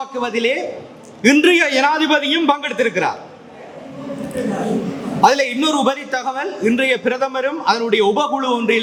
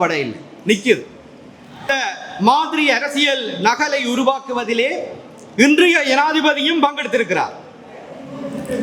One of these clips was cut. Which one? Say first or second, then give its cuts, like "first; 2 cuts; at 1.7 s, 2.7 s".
second; 1 cut; at 1.9 s